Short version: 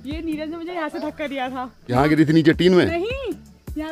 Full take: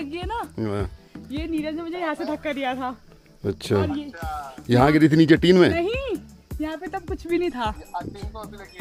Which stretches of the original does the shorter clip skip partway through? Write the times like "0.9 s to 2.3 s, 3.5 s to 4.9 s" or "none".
3.2 s to 4.8 s

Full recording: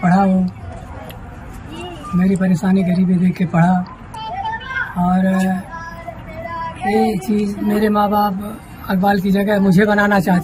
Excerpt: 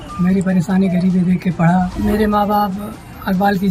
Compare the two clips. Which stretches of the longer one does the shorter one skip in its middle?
3.9 s to 7.6 s

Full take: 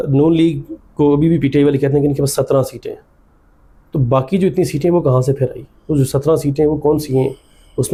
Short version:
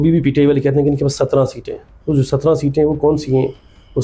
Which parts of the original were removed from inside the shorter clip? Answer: 3.0 s to 5.7 s

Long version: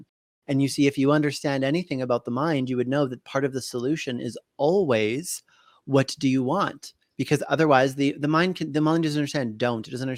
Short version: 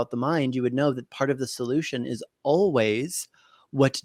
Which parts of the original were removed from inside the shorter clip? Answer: none

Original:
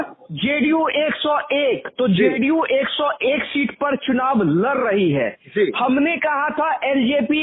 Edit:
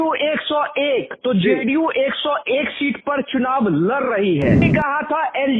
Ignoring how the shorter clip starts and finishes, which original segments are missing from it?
5.4 s to 6.2 s

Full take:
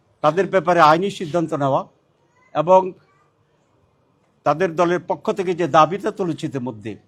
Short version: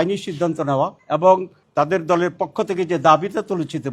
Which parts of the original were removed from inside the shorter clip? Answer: 1.9 s to 2.4 s, 3.0 s to 4.3 s

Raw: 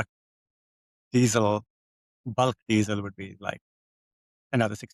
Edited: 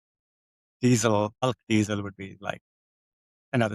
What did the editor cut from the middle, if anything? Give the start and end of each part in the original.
1.7 s to 2.4 s

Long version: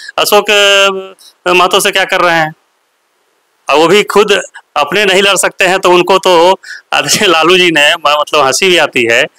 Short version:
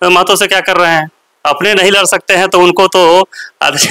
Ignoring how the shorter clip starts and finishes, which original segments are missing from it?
2.7 s to 4.6 s

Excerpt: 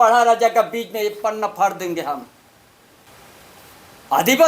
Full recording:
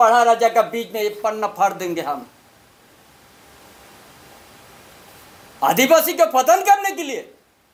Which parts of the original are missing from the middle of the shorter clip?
3.1 s to 4.6 s

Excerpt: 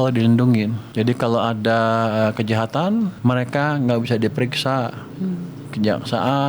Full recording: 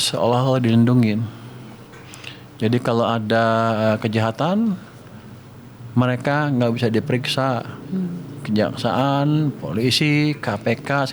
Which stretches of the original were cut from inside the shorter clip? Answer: 1.3 s to 2.5 s, 4.8 s to 5.9 s

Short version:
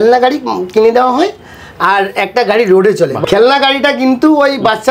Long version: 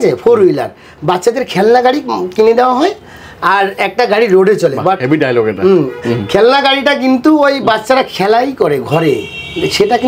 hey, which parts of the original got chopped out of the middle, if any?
4.8 s to 6.2 s

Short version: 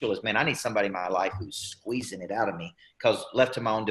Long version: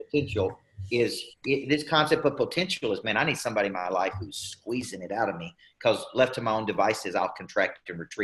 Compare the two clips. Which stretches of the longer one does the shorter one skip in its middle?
none

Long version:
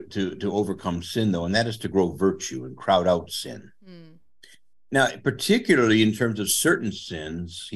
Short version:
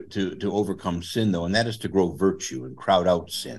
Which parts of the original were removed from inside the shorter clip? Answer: none

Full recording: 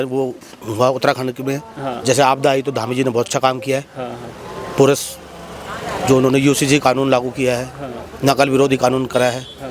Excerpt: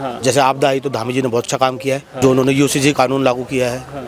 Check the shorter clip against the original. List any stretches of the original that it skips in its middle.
3.9 s to 6.0 s

